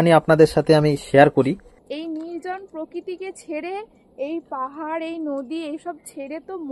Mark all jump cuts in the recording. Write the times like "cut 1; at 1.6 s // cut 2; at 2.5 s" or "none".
cut 1; at 1.8 s